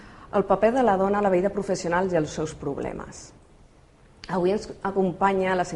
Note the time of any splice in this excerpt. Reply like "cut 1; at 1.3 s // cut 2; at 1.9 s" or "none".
cut 1; at 1.4 s

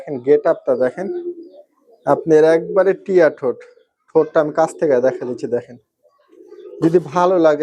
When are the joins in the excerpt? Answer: none

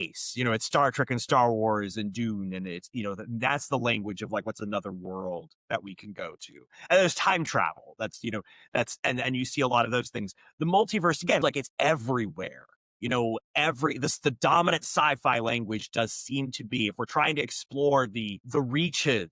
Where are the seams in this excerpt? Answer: cut 1; at 11.4 s

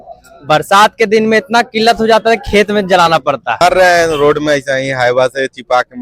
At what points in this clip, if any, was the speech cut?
cut 1; at 3.6 s

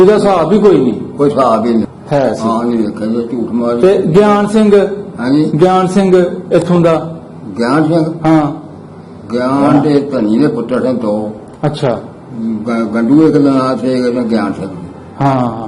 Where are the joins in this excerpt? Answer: cut 1; at 1.9 s

